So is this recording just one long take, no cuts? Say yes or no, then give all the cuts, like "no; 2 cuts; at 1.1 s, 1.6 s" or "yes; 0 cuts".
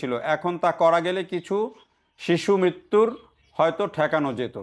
yes; 0 cuts